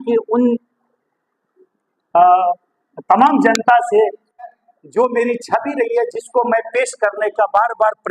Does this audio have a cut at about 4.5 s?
yes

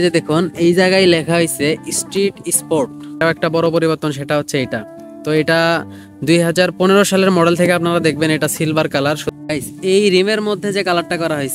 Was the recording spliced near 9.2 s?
yes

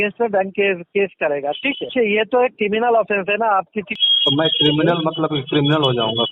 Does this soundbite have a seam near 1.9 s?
yes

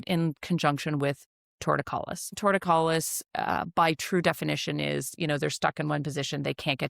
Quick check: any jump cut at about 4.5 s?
no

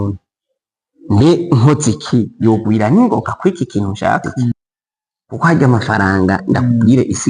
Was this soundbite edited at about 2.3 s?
no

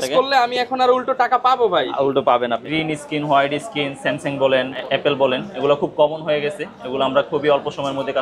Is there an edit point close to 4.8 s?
yes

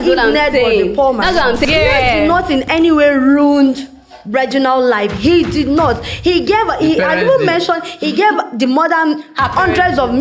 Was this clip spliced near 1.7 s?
yes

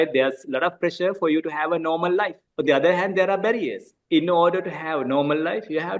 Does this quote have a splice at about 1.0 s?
no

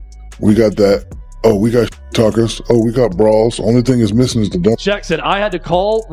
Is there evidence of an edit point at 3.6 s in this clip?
no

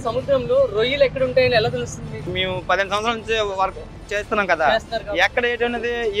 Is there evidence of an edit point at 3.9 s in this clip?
no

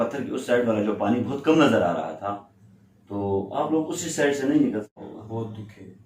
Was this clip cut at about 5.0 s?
yes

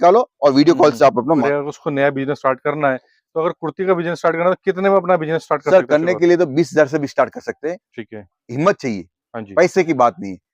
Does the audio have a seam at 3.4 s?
no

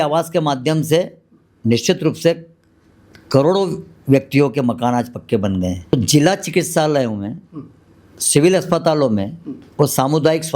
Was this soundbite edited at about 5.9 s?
yes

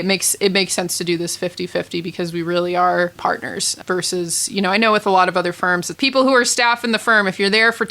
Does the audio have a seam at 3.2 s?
yes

